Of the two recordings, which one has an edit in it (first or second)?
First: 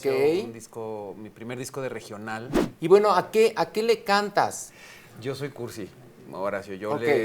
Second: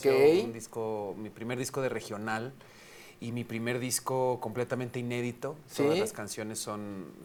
first